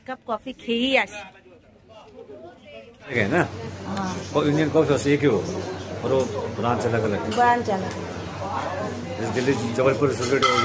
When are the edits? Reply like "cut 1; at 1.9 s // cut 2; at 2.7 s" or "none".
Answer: cut 1; at 3.1 s